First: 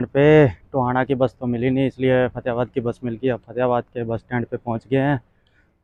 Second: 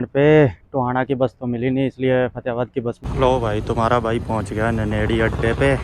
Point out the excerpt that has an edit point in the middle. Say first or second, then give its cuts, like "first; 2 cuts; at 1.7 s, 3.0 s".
second; 1 cut; at 3.0 s